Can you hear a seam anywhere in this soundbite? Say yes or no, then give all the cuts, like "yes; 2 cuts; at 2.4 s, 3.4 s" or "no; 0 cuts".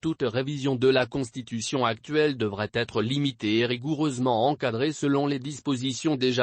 no; 0 cuts